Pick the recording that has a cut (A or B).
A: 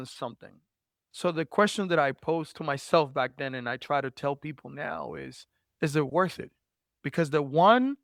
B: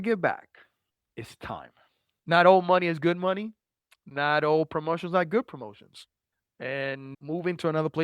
B